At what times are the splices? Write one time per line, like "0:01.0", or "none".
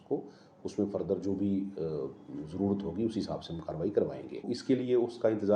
0:04.3